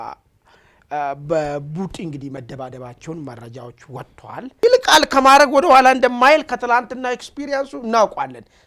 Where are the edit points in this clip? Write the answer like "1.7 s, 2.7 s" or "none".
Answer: 4.5 s

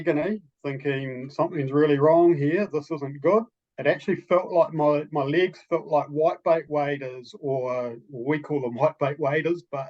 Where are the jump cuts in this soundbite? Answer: 3.6 s

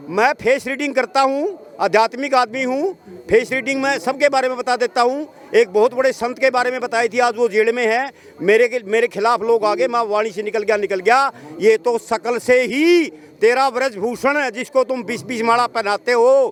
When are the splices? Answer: none

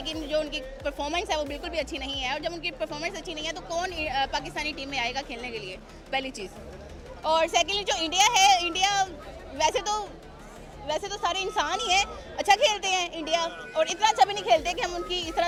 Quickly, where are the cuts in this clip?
none

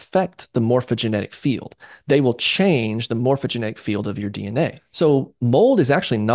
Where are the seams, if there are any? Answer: 4.8 s

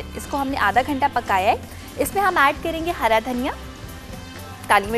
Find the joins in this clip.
1.7 s

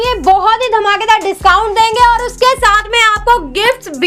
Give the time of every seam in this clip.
none

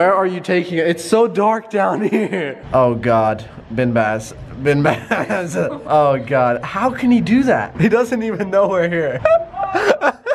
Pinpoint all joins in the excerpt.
2.6 s, 7.7 s, 9.2 s

